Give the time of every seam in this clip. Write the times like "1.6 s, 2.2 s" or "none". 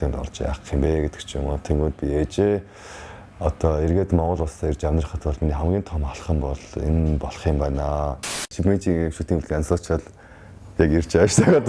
8.5 s

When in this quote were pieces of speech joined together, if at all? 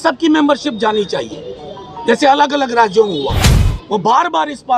3.4 s

